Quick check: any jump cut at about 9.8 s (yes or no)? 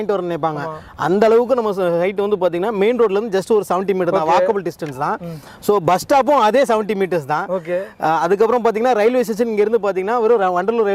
no